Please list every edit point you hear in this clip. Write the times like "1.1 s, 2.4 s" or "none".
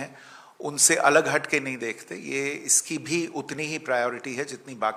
none